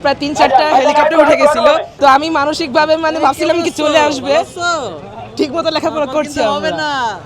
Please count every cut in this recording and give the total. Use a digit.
1